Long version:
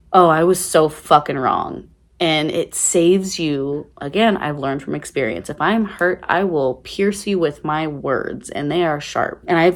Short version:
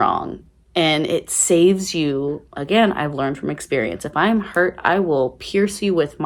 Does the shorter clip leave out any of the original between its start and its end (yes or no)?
no